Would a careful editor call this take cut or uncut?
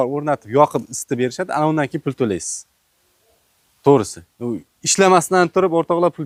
uncut